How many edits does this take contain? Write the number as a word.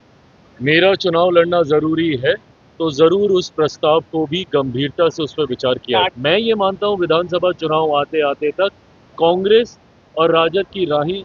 one